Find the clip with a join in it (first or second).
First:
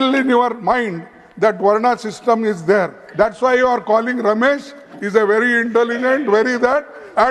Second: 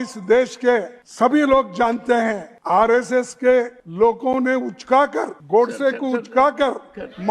second